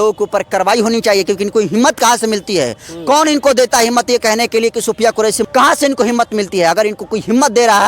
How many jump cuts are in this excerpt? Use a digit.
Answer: 1